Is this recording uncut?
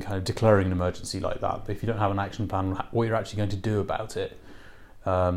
yes; 0 cuts

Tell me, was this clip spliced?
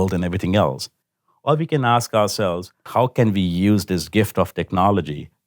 yes; 1 cut; at 2.9 s

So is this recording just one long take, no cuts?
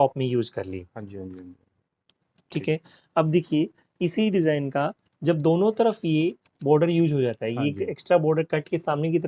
yes; 0 cuts

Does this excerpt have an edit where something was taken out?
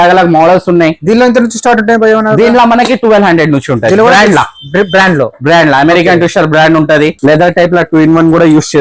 yes; 1 cut; at 7.1 s

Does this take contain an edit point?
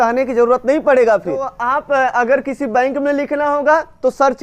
yes; 1 cut; at 1.5 s

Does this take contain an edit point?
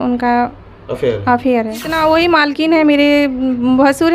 yes; 1 cut; at 1.9 s

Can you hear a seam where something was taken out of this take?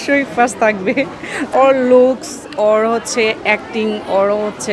yes; 1 cut; at 1.5 s

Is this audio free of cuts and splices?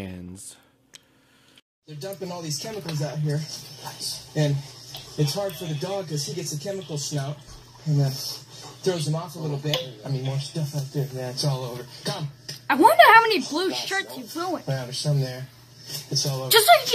yes; 0 cuts

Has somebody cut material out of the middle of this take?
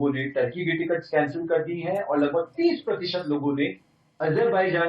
no; 0 cuts

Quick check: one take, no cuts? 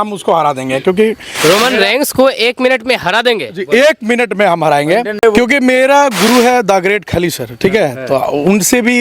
no; 1 cut; at 5.2 s

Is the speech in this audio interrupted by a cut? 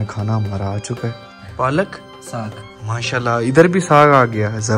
no; 0 cuts

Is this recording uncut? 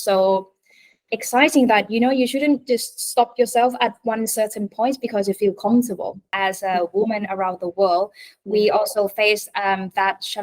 no; 1 cut; at 6.3 s

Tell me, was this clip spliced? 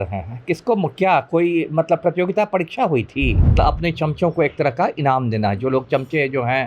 yes; 1 cut; at 3.4 s

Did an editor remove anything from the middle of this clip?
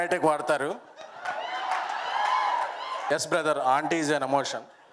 yes; 1 cut; at 3.0 s

